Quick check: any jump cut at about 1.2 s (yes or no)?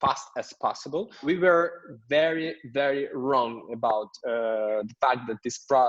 yes